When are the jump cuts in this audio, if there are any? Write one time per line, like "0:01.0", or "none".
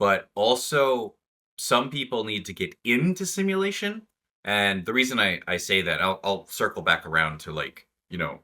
none